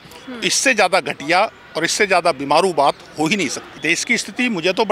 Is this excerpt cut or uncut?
cut